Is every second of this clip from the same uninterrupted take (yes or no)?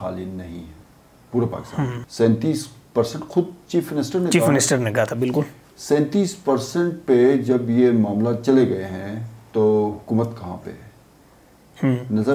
no